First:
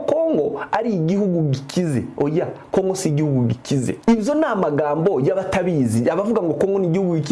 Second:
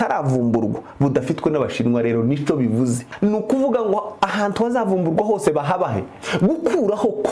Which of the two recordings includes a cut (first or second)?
second